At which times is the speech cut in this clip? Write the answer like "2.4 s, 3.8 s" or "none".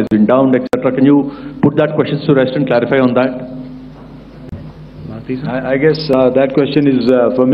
none